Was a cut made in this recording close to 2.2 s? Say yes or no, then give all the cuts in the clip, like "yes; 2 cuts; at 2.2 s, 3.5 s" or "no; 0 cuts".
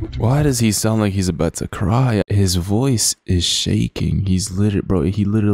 yes; 1 cut; at 2.2 s